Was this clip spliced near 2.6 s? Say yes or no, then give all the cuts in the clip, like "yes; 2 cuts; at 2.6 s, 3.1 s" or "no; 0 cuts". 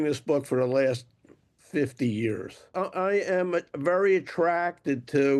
no; 0 cuts